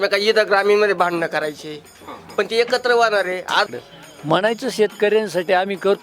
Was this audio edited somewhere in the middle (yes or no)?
yes